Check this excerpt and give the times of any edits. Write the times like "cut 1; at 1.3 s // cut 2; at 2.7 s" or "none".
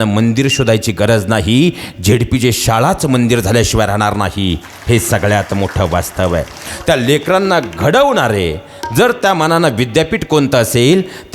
none